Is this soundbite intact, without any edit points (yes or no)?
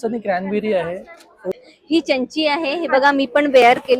no